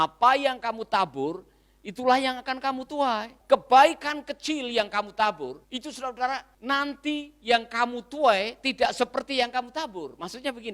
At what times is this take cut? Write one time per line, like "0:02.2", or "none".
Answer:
0:03.3
0:05.6
0:06.5